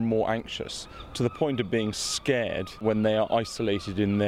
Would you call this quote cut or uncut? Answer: cut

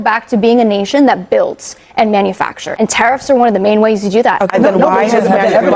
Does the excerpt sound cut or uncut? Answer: cut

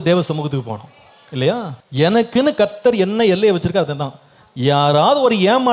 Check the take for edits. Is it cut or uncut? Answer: cut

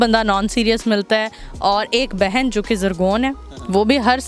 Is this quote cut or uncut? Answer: uncut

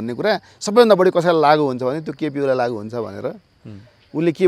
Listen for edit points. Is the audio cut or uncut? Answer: uncut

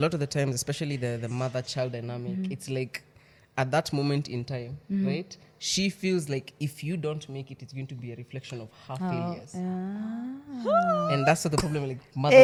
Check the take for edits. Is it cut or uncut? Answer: uncut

